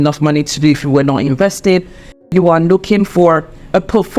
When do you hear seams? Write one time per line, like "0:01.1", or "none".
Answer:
0:02.3